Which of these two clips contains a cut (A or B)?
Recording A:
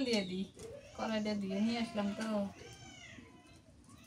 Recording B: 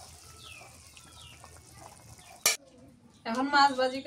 B